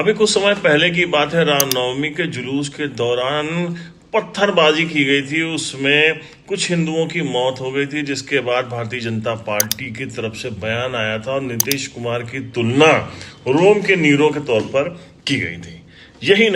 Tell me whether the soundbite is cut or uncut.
uncut